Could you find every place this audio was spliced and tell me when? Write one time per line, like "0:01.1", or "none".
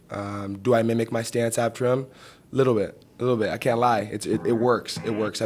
none